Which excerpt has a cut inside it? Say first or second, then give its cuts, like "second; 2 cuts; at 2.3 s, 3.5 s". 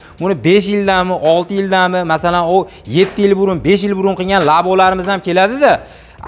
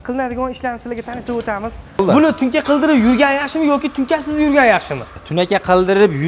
second; 2 cuts; at 2.0 s, 5.1 s